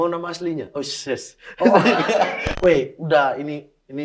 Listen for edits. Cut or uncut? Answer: cut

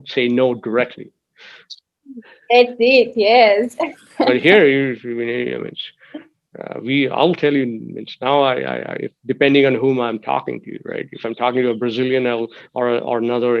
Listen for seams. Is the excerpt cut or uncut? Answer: uncut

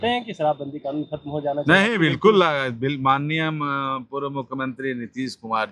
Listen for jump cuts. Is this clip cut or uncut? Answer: uncut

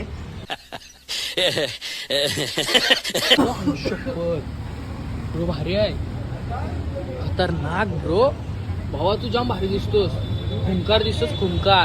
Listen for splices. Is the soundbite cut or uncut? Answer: cut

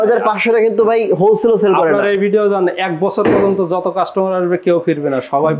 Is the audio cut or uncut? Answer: uncut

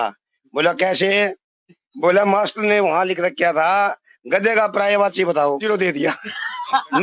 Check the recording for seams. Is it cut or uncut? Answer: cut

